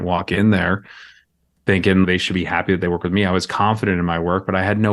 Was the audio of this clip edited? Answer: yes; 1 cut; at 2.1 s

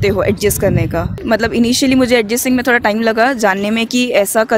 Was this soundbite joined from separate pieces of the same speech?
yes; 1 cut; at 1.2 s

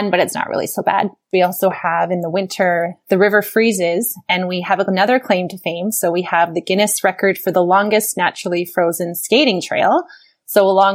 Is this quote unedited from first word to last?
no; 1 cut; at 1.2 s

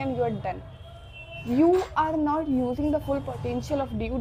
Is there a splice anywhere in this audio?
no; 0 cuts

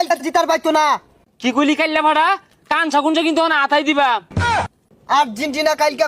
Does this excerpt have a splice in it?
yes; 2 cuts; at 1.1 s, 4.7 s

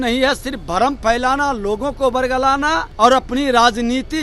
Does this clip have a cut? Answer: yes; 1 cut; at 2.9 s

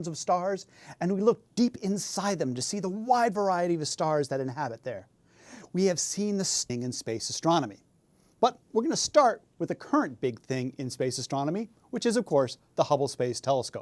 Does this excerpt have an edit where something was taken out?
no; 0 cuts

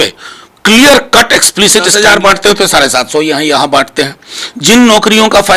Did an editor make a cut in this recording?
yes; 1 cut; at 1.9 s

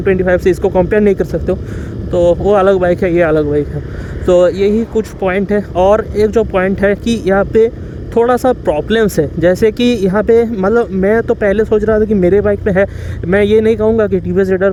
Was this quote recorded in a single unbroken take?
yes; 0 cuts

